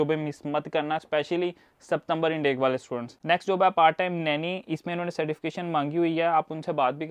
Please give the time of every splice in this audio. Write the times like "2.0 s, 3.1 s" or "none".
none